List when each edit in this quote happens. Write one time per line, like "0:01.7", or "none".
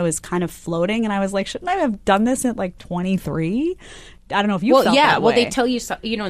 none